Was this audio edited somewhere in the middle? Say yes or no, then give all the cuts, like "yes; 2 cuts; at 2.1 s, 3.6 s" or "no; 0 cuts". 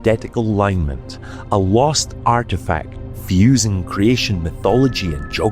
yes; 1 cut; at 2.9 s